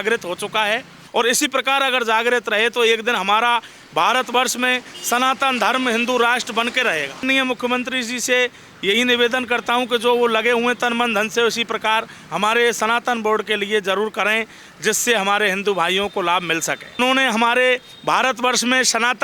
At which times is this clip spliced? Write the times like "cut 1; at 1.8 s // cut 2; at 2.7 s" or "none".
cut 1; at 0.9 s // cut 2; at 7.2 s // cut 3; at 17.0 s